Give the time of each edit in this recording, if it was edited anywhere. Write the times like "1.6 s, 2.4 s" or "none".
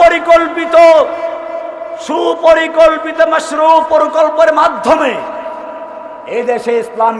none